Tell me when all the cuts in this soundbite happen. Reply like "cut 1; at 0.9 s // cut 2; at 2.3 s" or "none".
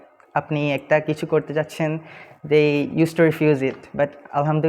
none